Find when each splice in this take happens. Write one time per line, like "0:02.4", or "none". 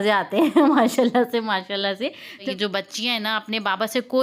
0:02.5